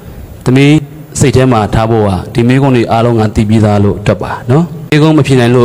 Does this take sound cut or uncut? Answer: cut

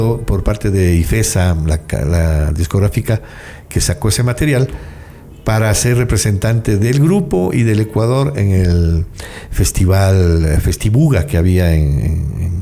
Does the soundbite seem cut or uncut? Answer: uncut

